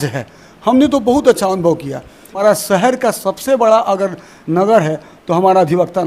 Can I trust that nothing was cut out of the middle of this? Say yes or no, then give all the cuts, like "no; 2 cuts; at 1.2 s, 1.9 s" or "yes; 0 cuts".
no; 1 cut; at 2.4 s